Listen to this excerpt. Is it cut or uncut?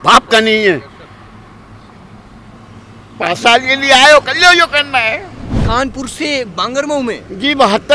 cut